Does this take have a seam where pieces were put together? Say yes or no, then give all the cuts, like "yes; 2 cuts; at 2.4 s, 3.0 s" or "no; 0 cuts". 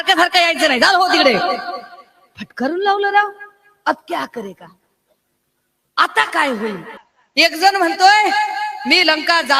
no; 0 cuts